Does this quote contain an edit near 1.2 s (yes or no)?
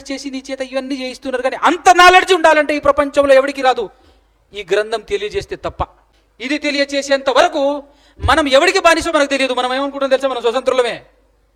no